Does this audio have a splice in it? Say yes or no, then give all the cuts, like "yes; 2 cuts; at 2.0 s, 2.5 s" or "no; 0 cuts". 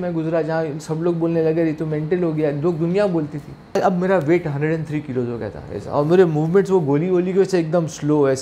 yes; 1 cut; at 3.8 s